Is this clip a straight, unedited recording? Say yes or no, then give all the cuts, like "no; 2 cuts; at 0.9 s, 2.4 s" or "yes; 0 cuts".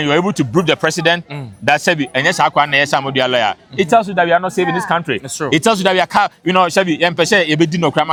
yes; 0 cuts